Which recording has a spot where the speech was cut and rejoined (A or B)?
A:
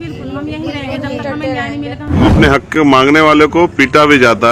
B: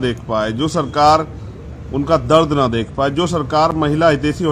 A